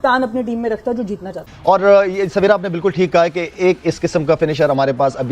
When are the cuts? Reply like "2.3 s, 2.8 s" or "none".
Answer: 1.6 s